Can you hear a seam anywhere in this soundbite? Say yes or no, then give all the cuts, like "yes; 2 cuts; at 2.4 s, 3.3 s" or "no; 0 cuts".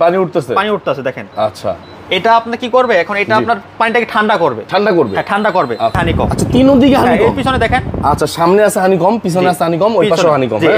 yes; 1 cut; at 6.0 s